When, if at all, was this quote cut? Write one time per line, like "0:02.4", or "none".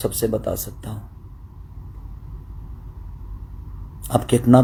none